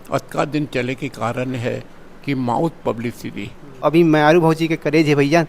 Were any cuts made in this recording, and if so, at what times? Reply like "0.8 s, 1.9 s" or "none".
3.8 s